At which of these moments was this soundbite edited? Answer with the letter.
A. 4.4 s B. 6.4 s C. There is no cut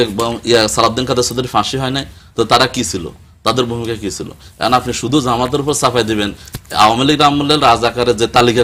C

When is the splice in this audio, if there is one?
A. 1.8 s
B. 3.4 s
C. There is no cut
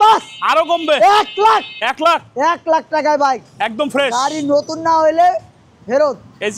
C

